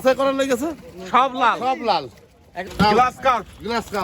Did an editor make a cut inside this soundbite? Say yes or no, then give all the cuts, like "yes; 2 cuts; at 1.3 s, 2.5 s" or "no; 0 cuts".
yes; 1 cut; at 2.6 s